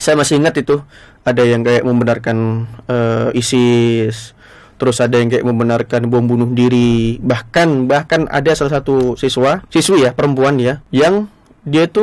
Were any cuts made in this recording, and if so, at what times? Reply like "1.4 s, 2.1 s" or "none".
9.6 s, 10.8 s